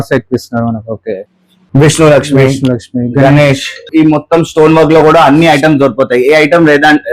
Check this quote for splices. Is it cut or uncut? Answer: cut